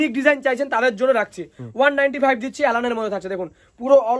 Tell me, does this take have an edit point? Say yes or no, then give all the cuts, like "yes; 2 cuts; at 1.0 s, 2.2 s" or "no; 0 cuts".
no; 0 cuts